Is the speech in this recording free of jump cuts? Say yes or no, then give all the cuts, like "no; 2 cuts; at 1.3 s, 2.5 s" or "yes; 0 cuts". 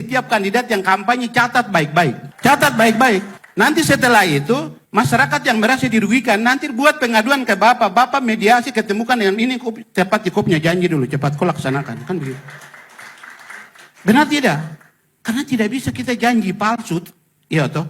yes; 0 cuts